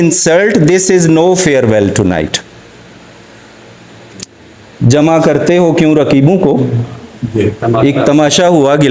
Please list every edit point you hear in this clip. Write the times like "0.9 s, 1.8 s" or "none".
none